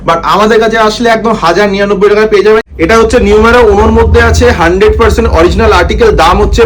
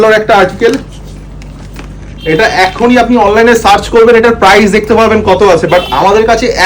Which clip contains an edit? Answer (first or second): first